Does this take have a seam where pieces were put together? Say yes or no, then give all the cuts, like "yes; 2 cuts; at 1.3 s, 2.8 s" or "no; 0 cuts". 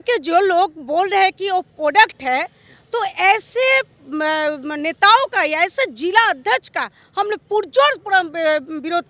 no; 0 cuts